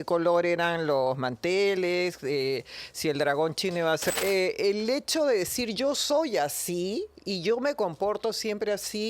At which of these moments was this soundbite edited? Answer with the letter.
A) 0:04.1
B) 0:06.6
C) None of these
A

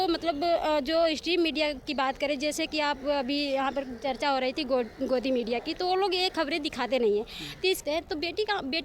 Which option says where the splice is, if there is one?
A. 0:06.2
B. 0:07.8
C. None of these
B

